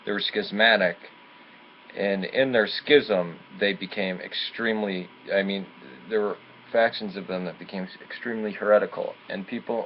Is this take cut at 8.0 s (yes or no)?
yes